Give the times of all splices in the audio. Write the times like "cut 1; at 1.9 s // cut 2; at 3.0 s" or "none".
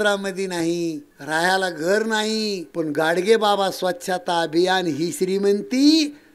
cut 1; at 1.1 s // cut 2; at 2.6 s